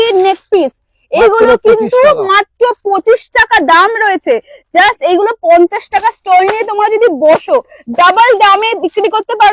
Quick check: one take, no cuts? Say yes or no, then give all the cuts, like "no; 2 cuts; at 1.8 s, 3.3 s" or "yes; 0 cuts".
yes; 0 cuts